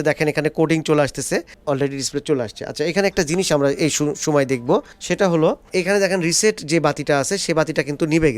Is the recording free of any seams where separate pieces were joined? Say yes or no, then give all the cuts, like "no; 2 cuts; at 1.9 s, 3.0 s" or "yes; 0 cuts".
yes; 0 cuts